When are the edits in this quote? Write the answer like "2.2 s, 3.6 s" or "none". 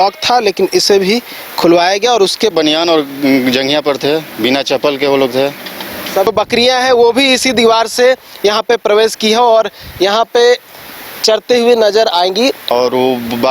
2.5 s, 6.3 s, 12.6 s